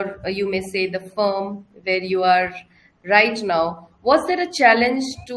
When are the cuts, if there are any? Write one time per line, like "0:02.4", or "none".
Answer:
none